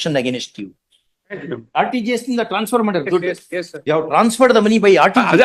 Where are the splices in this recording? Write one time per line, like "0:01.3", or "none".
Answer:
0:01.5
0:03.7